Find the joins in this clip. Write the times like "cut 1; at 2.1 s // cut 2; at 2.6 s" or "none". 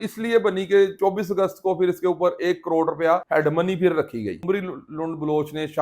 cut 1; at 1.0 s // cut 2; at 3.2 s // cut 3; at 4.4 s